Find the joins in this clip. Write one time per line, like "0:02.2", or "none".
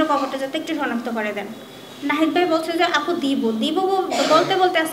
none